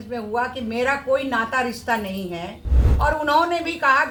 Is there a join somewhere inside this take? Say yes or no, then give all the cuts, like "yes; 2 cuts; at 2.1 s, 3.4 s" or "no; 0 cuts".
no; 0 cuts